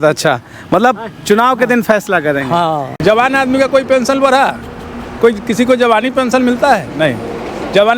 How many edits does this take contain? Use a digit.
1